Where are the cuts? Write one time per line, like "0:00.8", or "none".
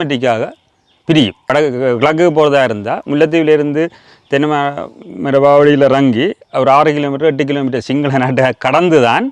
0:01.5